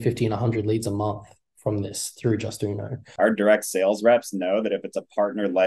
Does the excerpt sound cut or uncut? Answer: cut